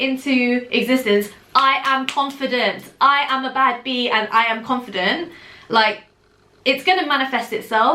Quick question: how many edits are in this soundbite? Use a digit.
0